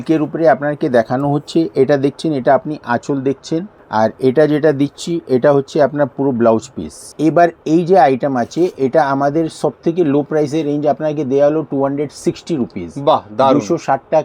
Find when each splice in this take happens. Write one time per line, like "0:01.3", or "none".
0:03.8
0:07.1